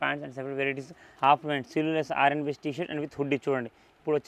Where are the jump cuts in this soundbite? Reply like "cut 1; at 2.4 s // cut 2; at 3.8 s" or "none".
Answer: cut 1; at 1.0 s